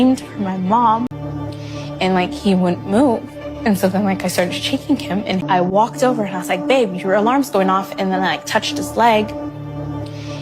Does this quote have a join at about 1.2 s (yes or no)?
yes